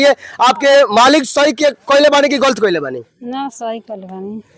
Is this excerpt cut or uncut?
uncut